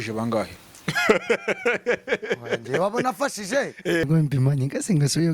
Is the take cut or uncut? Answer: cut